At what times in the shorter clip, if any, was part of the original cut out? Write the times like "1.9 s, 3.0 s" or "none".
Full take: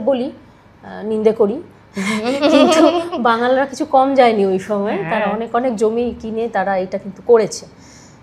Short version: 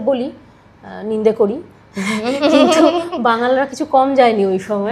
none